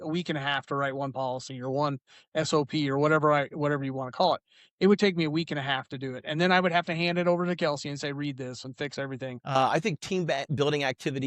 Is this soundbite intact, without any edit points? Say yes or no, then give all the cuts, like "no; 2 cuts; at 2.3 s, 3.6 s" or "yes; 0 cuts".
no; 1 cut; at 9.5 s